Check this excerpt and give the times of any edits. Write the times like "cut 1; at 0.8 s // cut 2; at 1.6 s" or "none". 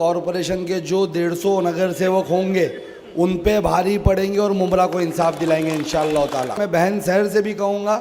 cut 1; at 6.5 s